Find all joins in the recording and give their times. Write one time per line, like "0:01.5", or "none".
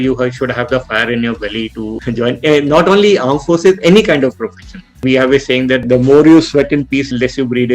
0:02.0
0:05.1